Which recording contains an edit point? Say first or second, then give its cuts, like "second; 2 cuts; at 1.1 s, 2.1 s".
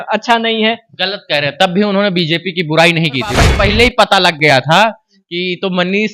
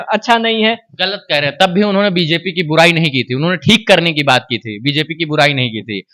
first; 1 cut; at 3.5 s